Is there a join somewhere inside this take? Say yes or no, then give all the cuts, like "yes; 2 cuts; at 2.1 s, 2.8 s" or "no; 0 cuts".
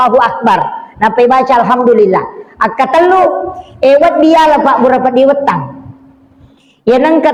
no; 0 cuts